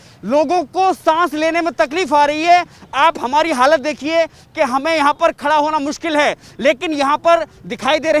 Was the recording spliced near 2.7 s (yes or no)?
no